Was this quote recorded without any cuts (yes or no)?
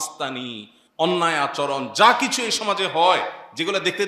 yes